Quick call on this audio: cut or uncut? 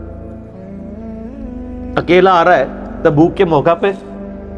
uncut